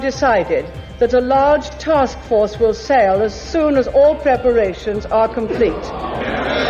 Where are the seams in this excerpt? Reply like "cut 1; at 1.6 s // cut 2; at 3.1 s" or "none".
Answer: none